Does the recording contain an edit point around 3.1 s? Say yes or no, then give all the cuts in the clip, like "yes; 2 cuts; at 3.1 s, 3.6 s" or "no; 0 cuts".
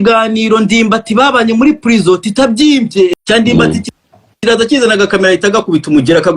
yes; 1 cut; at 3.1 s